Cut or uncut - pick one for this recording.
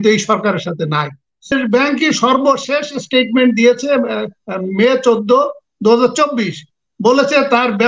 cut